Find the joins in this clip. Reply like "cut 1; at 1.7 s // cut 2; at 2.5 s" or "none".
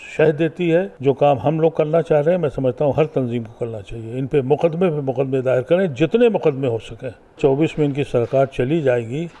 cut 1; at 0.9 s // cut 2; at 7.4 s